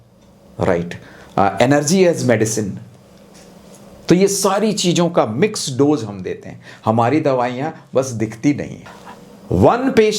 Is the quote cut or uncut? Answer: cut